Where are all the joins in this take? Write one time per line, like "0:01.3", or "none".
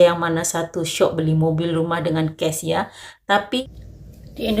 0:03.6

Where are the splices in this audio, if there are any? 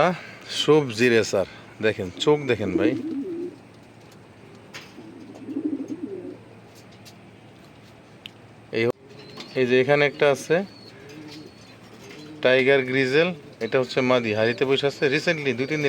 0:08.9

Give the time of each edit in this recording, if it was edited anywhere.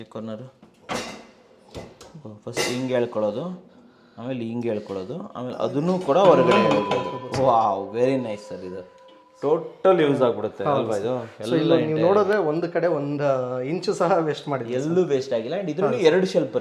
none

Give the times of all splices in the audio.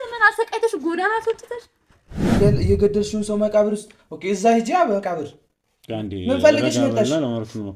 0:02.3

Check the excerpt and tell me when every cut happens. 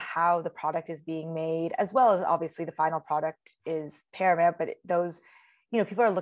none

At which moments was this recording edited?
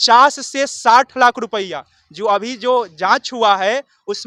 none

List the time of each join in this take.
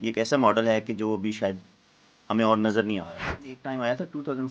0:03.6

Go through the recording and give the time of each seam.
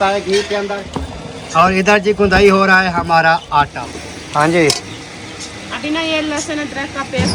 0:00.9
0:03.8

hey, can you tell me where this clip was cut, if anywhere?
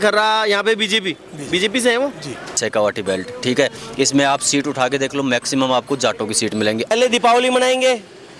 0:02.6
0:06.9

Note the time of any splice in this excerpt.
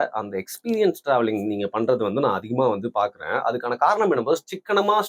none

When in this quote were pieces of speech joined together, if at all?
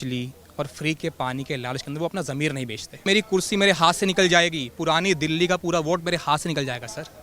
0:03.1

